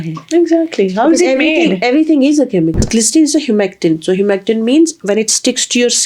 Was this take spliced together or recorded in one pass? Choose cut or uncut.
cut